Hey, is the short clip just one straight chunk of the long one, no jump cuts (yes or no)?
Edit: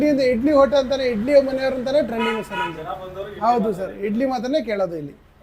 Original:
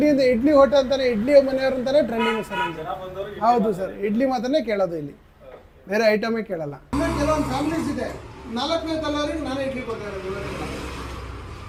yes